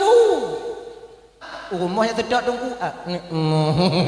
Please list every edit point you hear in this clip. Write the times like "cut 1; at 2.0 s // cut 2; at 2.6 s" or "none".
cut 1; at 1.5 s